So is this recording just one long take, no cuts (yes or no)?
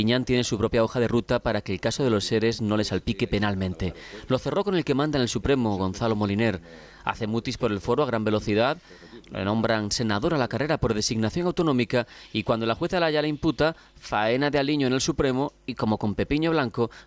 no